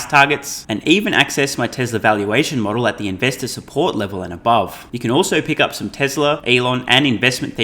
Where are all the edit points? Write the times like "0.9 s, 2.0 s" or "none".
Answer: 4.9 s, 6.4 s